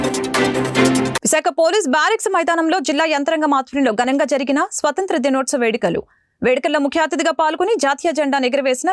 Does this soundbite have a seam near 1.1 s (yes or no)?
yes